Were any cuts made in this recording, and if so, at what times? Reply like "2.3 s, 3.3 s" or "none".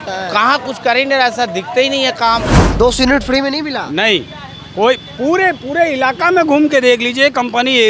2.7 s